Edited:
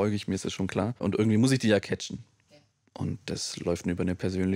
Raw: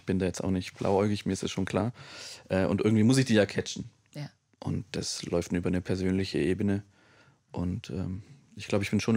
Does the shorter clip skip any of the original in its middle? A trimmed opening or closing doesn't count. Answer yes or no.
yes